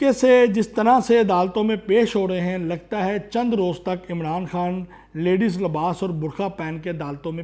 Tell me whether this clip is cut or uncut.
uncut